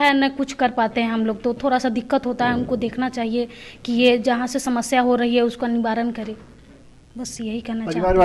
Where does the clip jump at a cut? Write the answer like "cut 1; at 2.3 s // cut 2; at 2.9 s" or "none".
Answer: none